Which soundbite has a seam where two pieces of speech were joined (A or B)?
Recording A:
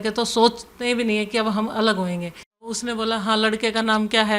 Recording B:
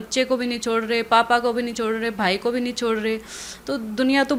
A